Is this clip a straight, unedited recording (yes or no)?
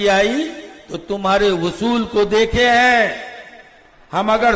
yes